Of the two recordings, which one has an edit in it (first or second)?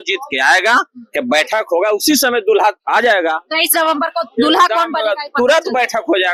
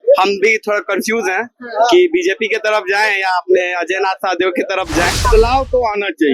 second